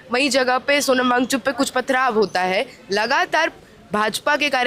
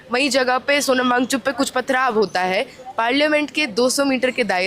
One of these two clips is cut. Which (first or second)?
second